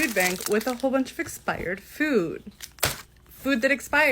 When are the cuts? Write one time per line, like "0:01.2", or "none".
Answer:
none